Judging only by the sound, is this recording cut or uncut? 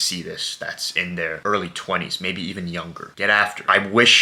uncut